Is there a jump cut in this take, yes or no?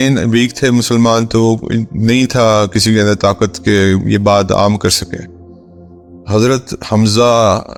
no